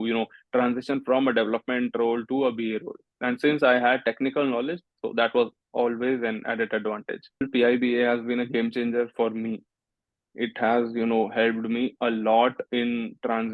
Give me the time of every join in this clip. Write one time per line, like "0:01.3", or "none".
0:07.5